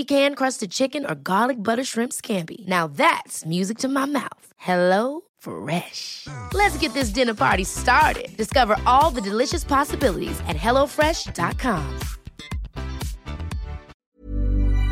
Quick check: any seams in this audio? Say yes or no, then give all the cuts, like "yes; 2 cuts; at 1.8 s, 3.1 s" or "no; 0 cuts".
yes; 1 cut; at 14.0 s